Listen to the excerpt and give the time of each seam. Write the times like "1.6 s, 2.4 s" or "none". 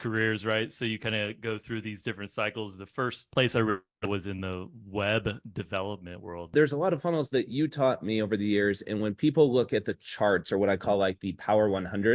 3.2 s, 6.5 s